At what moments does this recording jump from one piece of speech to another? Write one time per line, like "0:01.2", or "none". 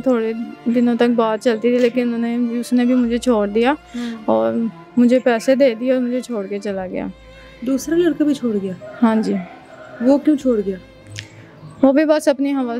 none